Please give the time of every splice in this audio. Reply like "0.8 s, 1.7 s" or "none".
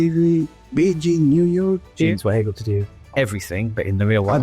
2.1 s